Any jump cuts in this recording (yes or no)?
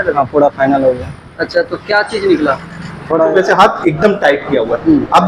yes